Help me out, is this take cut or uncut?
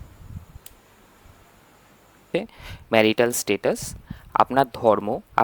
cut